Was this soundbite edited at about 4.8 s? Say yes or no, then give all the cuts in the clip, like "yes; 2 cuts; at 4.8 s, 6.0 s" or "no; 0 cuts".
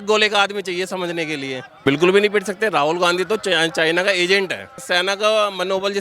yes; 2 cuts; at 1.7 s, 4.8 s